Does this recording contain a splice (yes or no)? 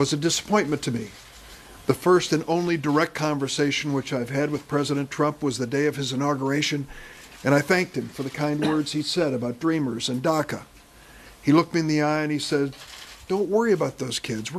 no